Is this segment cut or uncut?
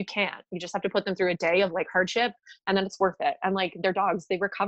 uncut